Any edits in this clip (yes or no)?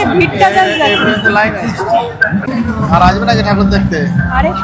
yes